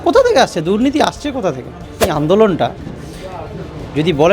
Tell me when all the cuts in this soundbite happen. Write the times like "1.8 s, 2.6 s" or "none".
2.1 s